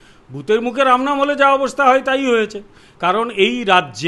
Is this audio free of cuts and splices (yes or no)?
yes